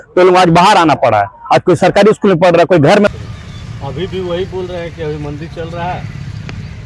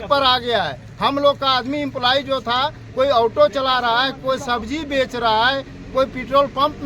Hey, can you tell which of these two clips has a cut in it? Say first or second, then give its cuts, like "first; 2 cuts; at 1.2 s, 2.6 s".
first; 1 cut; at 3.1 s